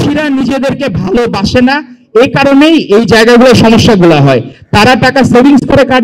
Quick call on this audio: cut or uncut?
uncut